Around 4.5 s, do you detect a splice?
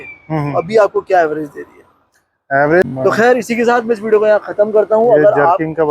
no; 1 cut; at 2.9 s

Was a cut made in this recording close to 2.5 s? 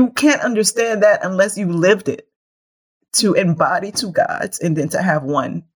no; 0 cuts

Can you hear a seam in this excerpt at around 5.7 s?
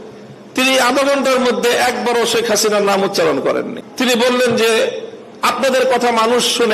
no; 1 cut; at 3.8 s

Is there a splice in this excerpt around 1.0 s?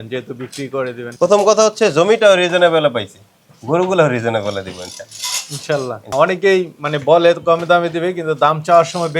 yes; 2 cuts; at 1.0 s, 6.0 s

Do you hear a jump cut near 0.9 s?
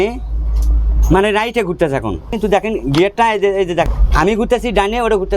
no; 2 cuts; at 2.3 s, 3.9 s

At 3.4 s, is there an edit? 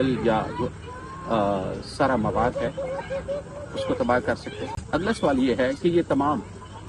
no; 1 cut; at 4.8 s

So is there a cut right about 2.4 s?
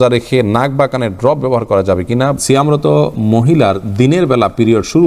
yes; 1 cut; at 2.4 s

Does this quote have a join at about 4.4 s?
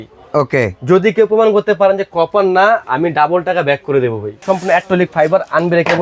yes; 1 cut; at 4.4 s

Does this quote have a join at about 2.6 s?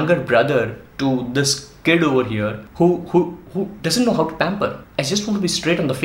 yes; 2 cuts; at 2.6 s, 4.8 s

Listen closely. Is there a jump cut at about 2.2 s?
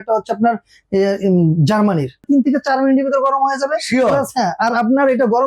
yes; 1 cut; at 2.2 s

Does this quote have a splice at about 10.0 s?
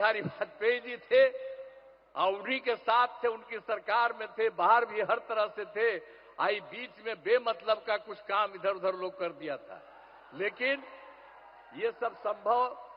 no; 0 cuts

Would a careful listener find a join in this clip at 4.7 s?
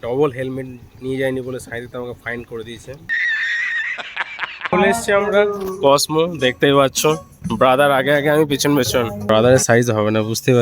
yes; 2 cuts; at 4.7 s, 9.2 s

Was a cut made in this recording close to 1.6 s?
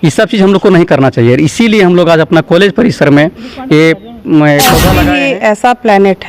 no; 1 cut; at 5.0 s

